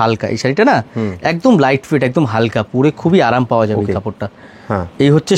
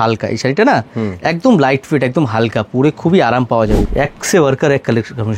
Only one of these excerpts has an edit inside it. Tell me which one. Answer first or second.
second